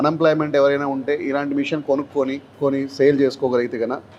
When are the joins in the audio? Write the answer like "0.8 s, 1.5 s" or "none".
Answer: 2.5 s

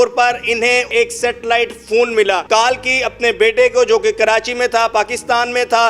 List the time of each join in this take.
0.9 s, 2.4 s

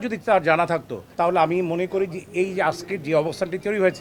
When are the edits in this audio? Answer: none

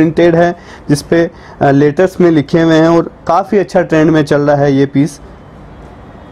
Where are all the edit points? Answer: none

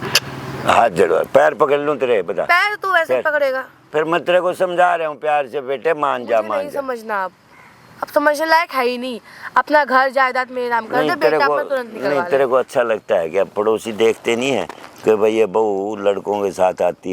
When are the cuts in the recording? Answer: none

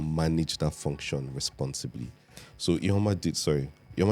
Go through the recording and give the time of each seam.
none

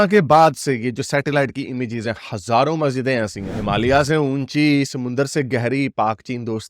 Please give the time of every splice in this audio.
3.4 s

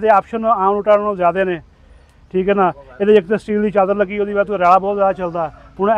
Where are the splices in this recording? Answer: none

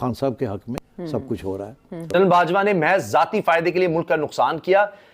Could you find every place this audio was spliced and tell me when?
2.0 s

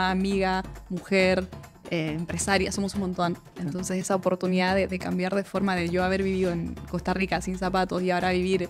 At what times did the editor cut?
3.5 s

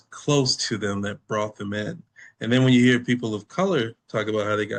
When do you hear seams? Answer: none

